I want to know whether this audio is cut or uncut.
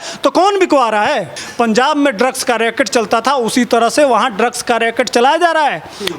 cut